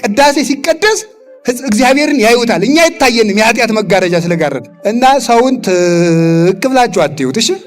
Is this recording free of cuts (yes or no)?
no